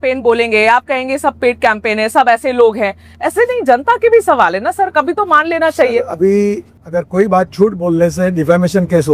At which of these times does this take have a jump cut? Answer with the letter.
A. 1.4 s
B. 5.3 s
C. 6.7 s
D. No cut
C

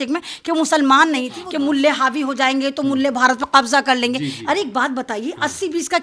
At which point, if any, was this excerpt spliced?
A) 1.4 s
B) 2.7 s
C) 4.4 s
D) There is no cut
A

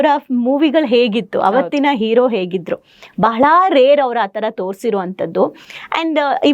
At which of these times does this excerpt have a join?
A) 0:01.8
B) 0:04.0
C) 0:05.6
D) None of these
D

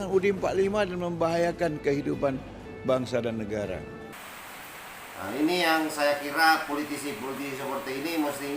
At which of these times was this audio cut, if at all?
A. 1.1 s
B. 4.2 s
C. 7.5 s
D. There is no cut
B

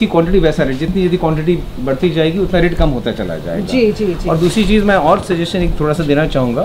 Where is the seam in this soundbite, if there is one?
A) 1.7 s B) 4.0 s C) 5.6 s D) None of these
D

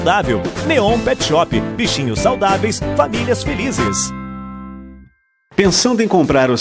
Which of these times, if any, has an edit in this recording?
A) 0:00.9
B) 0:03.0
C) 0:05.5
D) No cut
C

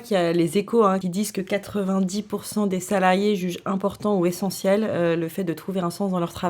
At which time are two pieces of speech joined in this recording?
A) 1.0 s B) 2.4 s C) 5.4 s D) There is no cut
A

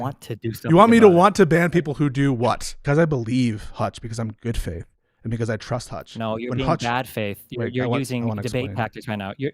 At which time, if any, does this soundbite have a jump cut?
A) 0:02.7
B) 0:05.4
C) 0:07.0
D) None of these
A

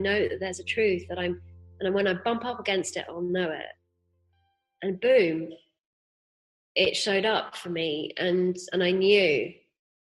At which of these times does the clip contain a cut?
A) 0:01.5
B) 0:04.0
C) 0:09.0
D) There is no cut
D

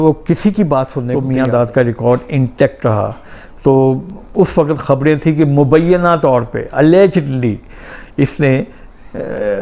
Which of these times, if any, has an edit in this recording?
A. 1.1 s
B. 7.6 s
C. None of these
A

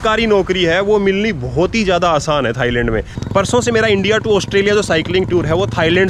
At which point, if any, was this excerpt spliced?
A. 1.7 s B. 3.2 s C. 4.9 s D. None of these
B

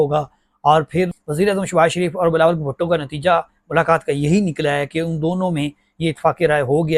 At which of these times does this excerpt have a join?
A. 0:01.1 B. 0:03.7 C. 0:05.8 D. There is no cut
A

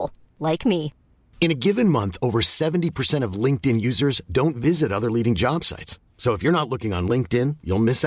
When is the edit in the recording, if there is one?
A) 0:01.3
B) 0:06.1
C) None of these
C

